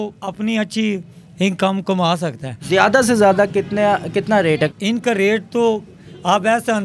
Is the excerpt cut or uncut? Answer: cut